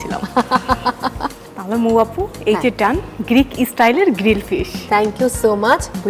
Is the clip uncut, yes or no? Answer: no